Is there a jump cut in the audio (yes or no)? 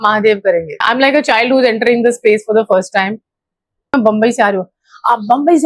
yes